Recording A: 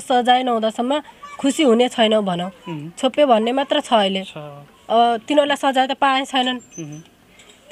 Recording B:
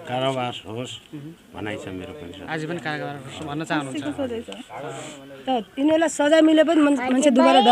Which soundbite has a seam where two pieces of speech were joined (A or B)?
B